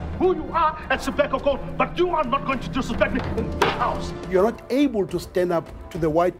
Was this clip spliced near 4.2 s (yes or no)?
yes